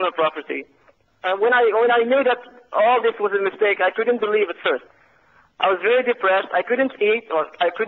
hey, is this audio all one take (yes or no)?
yes